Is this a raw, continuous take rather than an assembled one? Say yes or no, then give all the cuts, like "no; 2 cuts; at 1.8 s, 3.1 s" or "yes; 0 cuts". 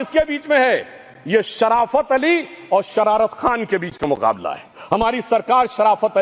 yes; 0 cuts